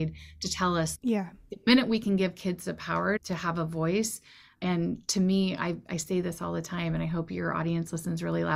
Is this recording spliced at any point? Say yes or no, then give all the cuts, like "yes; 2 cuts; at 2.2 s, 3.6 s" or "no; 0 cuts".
yes; 2 cuts; at 0.9 s, 3.2 s